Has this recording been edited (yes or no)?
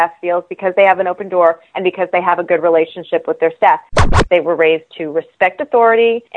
yes